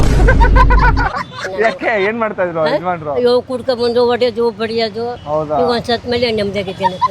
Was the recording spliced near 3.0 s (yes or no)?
no